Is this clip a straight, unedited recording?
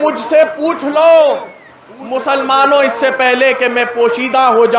yes; 0 cuts

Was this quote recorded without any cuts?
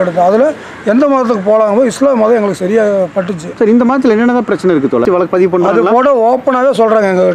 no; 1 cut; at 5.0 s

